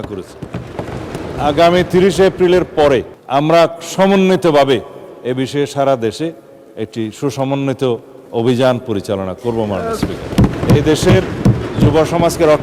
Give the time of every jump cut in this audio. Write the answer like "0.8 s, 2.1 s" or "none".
1.2 s, 3.2 s, 10.6 s